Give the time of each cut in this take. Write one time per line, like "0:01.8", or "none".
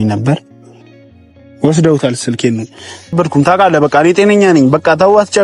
0:03.1